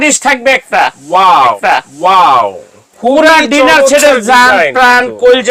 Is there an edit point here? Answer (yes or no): no